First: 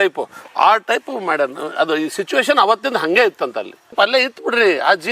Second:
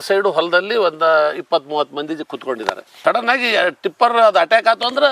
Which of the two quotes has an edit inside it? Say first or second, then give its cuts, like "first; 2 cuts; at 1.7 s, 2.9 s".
first; 1 cut; at 3.8 s